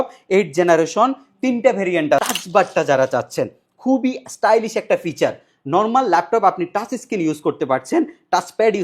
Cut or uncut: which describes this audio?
cut